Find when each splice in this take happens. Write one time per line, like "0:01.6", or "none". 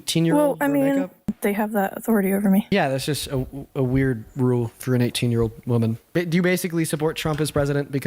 0:01.3
0:02.7
0:06.0